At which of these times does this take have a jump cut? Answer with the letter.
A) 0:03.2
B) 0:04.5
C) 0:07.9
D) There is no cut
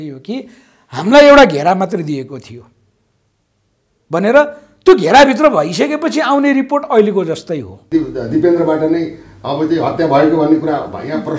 C